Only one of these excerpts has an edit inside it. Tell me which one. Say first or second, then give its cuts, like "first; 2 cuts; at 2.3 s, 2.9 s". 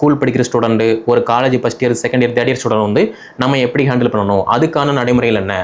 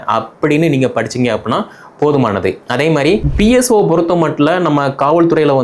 second; 1 cut; at 3.3 s